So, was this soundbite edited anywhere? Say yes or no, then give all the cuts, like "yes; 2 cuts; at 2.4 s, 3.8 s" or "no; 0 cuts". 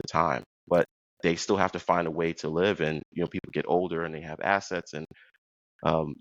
yes; 1 cut; at 1.0 s